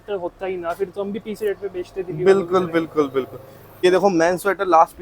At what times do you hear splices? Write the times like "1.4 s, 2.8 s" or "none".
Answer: 3.8 s